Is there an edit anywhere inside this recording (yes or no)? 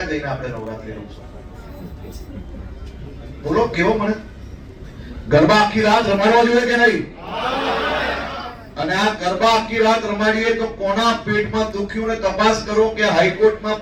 no